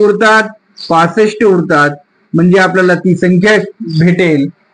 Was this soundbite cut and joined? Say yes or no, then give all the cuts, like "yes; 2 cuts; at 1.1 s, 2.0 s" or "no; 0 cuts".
no; 0 cuts